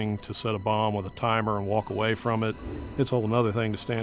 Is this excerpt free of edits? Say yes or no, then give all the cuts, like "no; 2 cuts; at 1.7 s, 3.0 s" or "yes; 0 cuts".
yes; 0 cuts